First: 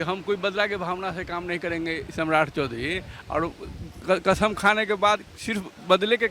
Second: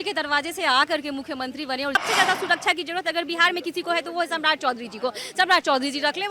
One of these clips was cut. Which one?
second; 1 cut; at 1.9 s

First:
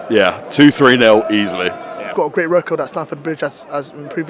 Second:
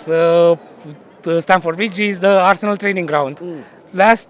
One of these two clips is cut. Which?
first; 1 cut; at 2.0 s

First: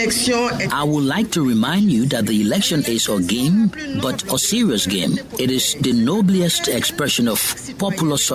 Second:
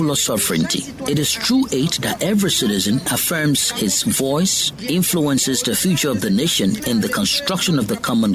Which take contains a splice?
second; 2 cuts; at 3.1 s, 6.8 s

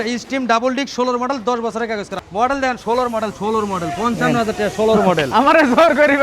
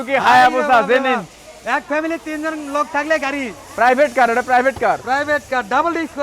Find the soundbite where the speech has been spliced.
first; 1 cut; at 2.1 s

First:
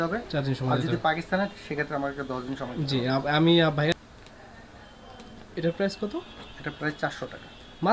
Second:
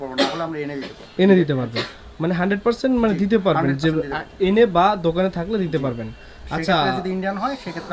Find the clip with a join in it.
first; 1 cut; at 3.9 s

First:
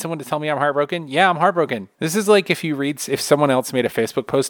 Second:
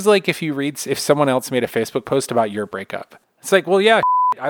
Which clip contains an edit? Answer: second; 1 cut; at 3.2 s

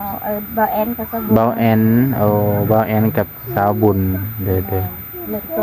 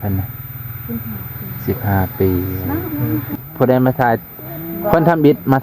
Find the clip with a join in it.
second; 1 cut; at 3.4 s

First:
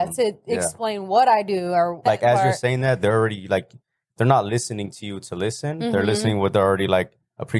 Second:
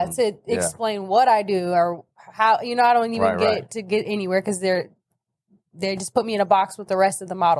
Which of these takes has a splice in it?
first; 1 cut; at 2.0 s

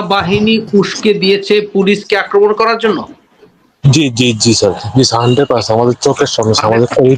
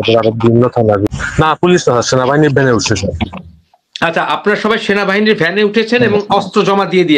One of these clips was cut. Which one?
second; 1 cut; at 1.1 s

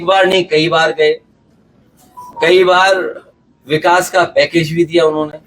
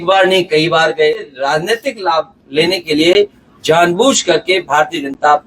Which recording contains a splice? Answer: second; 1 cut; at 1.4 s

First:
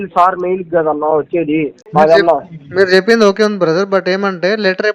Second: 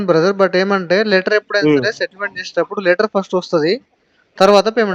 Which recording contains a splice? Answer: first; 1 cut; at 1.8 s

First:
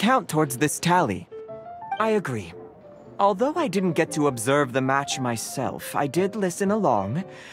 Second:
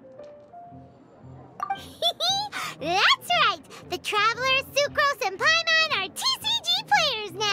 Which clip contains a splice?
second; 1 cut; at 1.8 s

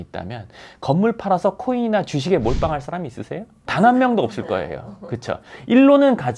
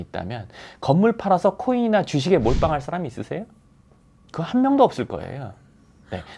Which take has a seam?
first; 1 cut; at 3.5 s

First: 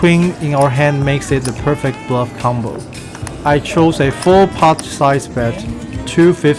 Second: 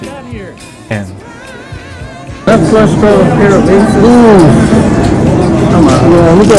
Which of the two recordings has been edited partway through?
second; 1 cut; at 0.9 s

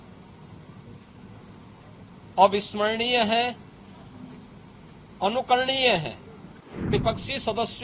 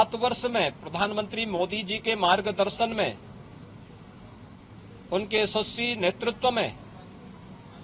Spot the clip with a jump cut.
first; 1 cut; at 6.9 s

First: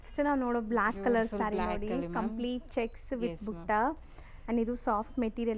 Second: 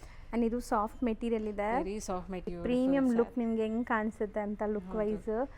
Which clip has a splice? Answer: second; 1 cut; at 2.5 s

